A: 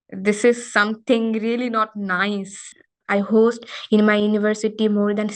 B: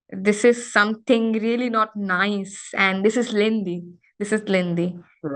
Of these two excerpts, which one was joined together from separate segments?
A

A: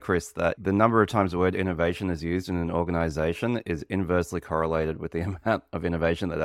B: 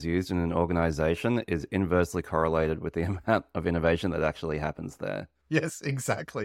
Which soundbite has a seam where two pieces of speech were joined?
B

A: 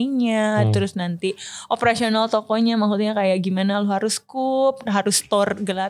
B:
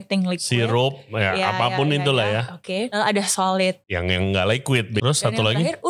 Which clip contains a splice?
B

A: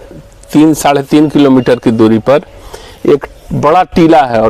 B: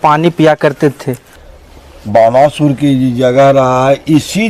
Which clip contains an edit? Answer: B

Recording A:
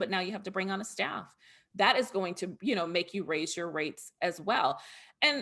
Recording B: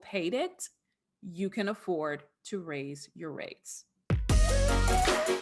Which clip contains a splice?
B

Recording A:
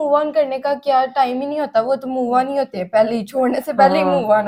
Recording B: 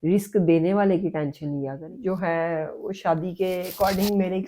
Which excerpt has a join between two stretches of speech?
B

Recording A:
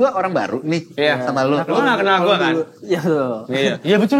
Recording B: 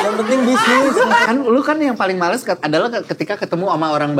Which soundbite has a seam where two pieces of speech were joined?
B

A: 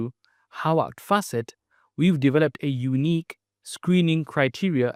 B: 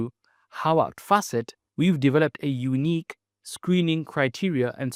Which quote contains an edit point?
B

